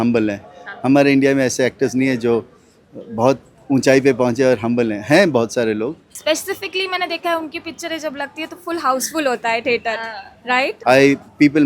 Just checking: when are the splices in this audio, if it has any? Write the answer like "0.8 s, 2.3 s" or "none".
6.1 s, 10.8 s